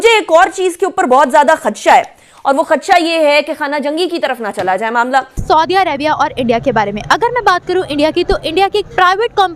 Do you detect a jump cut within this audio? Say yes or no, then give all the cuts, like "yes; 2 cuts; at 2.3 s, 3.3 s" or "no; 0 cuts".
yes; 1 cut; at 5.4 s